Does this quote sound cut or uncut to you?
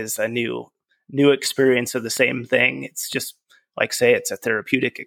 uncut